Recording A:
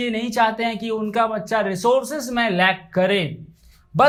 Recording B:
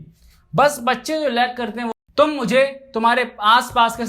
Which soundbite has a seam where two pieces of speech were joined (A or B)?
B